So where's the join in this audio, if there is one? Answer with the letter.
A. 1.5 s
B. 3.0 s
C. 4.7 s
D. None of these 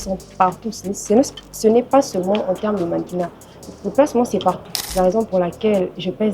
C